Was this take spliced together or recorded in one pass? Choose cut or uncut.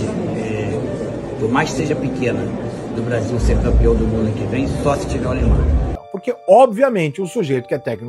cut